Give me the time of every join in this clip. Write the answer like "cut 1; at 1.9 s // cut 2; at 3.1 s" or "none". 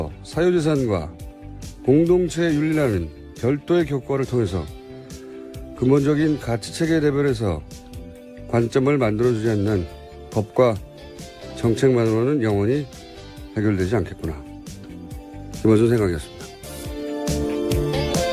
none